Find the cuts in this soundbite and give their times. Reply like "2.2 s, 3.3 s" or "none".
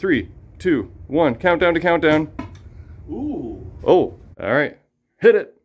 4.3 s